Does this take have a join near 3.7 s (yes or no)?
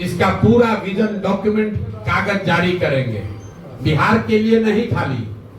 no